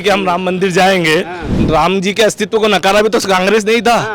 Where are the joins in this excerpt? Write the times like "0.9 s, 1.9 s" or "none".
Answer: 1.5 s